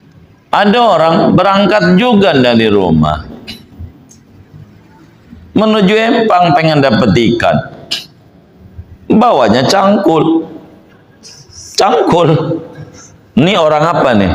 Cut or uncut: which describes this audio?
uncut